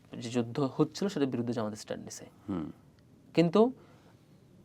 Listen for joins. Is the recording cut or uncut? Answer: uncut